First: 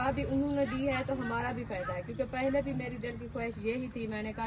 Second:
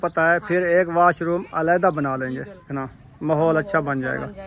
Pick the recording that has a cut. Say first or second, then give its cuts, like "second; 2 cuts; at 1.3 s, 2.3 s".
second; 1 cut; at 2.7 s